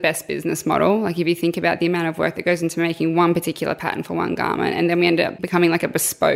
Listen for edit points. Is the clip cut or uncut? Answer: cut